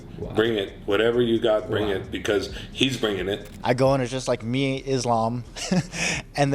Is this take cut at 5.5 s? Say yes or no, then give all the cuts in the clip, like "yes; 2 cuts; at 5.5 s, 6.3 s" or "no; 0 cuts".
no; 1 cut; at 3.5 s